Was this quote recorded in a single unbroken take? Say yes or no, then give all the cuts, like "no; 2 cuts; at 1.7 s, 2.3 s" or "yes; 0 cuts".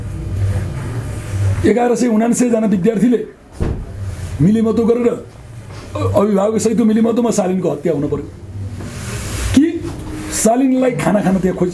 yes; 0 cuts